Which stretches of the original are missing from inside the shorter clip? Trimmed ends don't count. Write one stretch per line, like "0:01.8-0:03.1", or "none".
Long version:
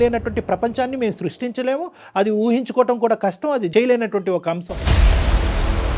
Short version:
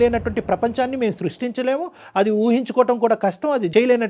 none